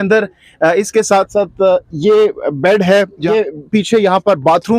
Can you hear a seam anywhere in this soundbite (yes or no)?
yes